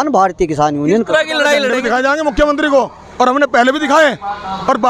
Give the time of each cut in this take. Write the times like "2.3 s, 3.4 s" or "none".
1.4 s

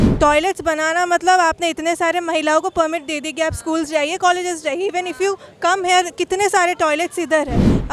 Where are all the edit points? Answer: none

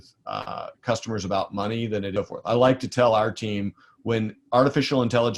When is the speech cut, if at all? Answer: 2.1 s

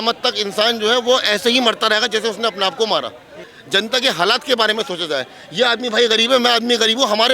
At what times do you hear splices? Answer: 3.5 s

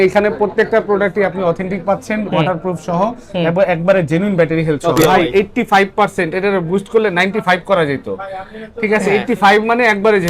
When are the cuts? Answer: 5.0 s

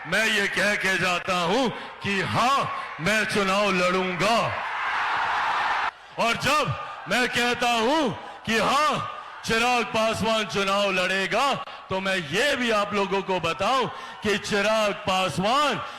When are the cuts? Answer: 5.9 s

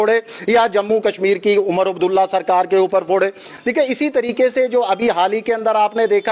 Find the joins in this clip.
none

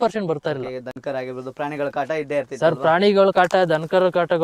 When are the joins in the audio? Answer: none

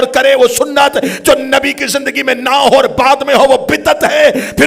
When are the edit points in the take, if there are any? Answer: 1.0 s

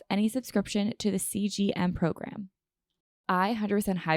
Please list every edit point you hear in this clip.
3.2 s

